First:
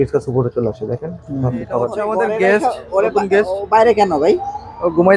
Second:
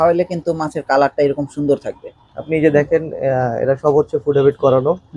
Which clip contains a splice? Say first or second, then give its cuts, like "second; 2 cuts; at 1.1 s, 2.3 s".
first; 1 cut; at 1.9 s